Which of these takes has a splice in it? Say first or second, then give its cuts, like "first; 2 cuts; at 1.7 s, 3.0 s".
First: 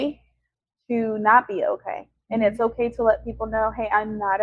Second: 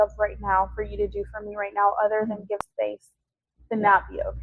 second; 1 cut; at 2.7 s